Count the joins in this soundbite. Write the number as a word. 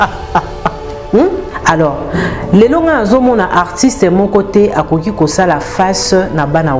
one